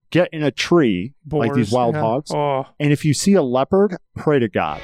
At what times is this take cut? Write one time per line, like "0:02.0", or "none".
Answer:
0:02.7